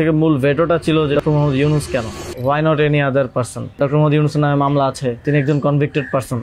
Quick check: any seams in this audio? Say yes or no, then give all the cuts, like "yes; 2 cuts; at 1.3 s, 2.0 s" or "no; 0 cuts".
yes; 4 cuts; at 1.2 s, 2.2 s, 3.8 s, 5.2 s